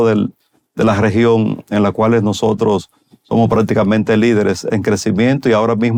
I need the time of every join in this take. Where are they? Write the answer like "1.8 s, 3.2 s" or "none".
none